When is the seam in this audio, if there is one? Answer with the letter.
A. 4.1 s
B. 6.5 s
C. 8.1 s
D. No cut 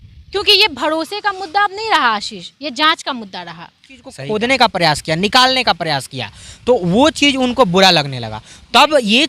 A